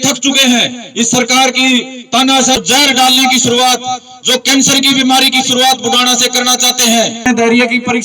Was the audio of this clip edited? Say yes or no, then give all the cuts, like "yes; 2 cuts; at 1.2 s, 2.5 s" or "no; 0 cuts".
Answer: yes; 2 cuts; at 2.6 s, 7.3 s